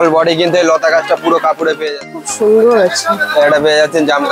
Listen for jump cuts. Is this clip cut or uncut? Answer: cut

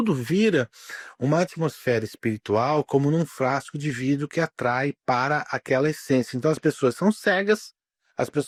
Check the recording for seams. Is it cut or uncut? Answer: uncut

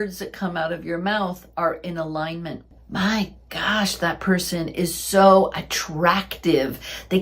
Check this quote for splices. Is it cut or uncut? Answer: cut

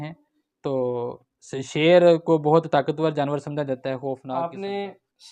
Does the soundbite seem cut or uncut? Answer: cut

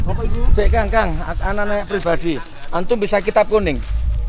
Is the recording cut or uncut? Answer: uncut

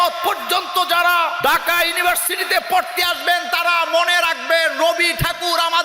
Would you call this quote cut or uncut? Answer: cut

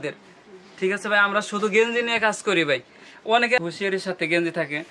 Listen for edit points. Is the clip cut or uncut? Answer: cut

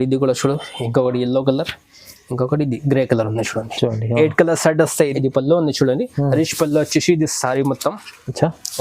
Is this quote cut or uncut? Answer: cut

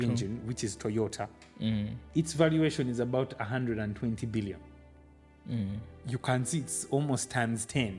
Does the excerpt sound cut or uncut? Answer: uncut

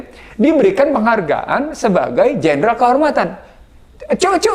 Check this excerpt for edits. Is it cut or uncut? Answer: uncut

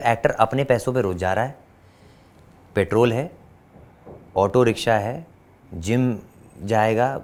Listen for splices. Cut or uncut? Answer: uncut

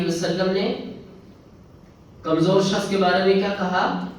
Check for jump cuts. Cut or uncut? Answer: uncut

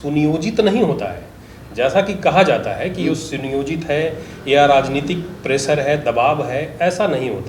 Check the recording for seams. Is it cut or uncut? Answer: uncut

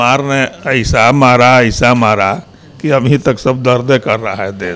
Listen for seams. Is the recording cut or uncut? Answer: uncut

